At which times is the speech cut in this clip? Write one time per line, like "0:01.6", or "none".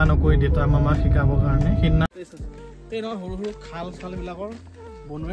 0:02.1

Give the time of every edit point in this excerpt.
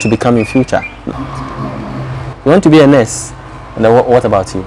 0:01.1

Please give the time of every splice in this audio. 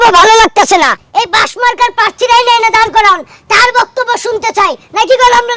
none

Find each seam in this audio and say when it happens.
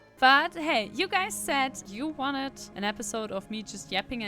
0:01.8
0:02.6

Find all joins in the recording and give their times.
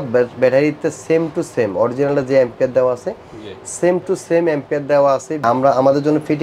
0:05.4

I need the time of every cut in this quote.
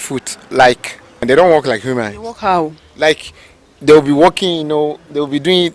0:01.2

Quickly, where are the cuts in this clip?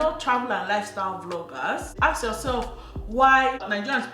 0:01.9

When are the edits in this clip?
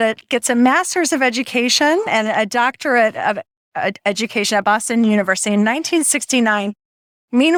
none

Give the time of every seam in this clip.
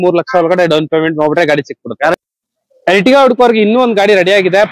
none

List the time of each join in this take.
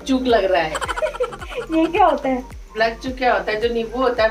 none

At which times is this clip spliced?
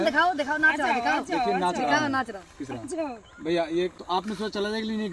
0:03.9

